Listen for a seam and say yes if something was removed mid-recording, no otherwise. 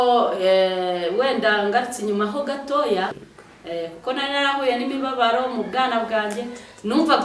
yes